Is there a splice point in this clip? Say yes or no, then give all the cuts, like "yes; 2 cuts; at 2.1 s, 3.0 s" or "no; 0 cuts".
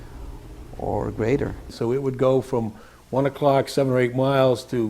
yes; 1 cut; at 1.6 s